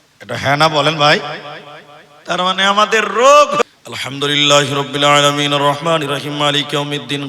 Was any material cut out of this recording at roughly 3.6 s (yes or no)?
yes